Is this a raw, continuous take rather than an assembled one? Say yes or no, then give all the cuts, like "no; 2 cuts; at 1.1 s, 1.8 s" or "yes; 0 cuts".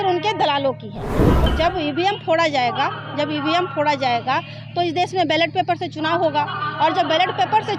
no; 1 cut; at 1.5 s